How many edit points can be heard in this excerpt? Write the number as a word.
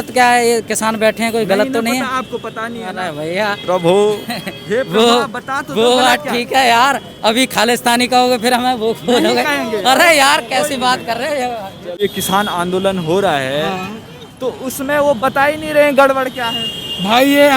one